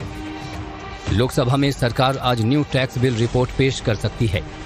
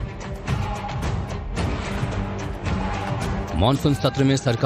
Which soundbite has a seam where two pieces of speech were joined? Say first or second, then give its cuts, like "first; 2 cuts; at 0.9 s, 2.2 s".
second; 1 cut; at 1.6 s